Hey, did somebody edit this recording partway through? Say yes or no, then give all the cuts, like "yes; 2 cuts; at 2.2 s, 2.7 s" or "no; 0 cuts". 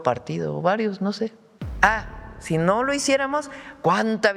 yes; 1 cut; at 1.5 s